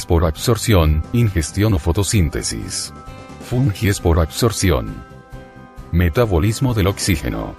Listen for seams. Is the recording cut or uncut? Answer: cut